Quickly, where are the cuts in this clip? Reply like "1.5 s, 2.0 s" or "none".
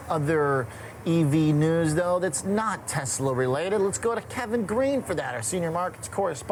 none